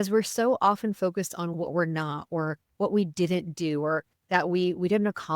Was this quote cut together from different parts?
yes; 1 cut; at 1.5 s

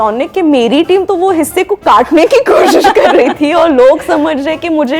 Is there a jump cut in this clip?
no; 0 cuts

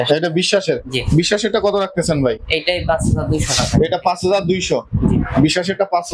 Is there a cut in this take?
no; 0 cuts

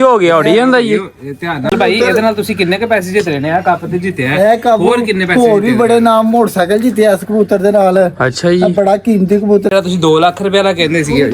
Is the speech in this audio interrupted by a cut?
yes; 2 cuts; at 1.7 s, 9.7 s

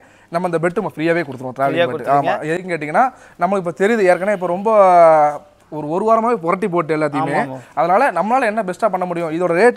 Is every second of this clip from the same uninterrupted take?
yes; 0 cuts

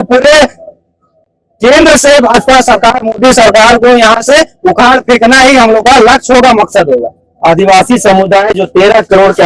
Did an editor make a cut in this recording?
no; 0 cuts

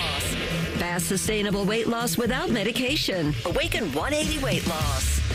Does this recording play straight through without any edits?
yes; 0 cuts

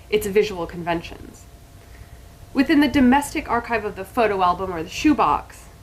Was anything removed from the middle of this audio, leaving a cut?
yes; 1 cut; at 1.2 s

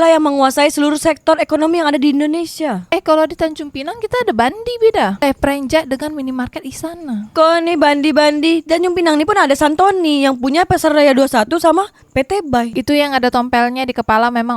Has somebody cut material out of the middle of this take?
yes; 1 cut; at 12.7 s

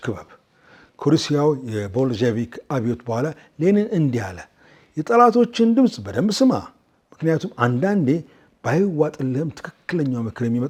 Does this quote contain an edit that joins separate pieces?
no; 0 cuts

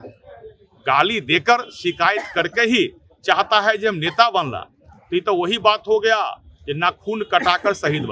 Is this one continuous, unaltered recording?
yes; 0 cuts

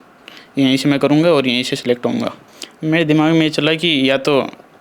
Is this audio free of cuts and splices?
no; 1 cut; at 2.4 s

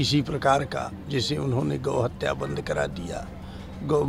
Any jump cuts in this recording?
no; 0 cuts

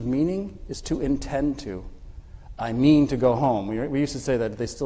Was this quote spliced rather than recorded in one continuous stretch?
no; 0 cuts

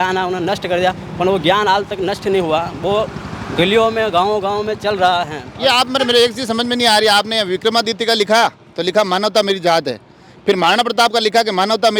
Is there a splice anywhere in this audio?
no; 0 cuts

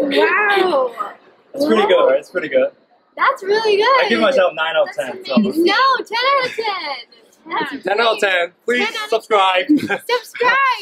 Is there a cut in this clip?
no; 0 cuts

